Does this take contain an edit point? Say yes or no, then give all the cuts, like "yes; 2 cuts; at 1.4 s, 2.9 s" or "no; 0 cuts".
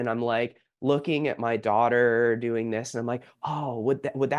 no; 0 cuts